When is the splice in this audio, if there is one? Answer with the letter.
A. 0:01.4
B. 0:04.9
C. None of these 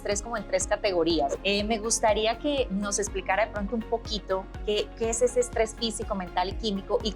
A